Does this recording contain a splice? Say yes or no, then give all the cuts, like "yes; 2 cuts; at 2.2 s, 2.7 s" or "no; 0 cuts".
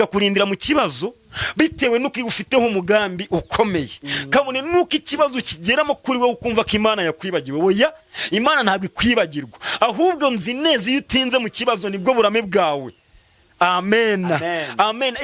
no; 0 cuts